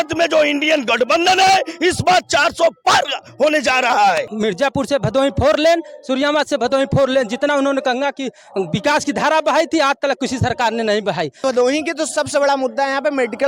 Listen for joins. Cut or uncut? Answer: cut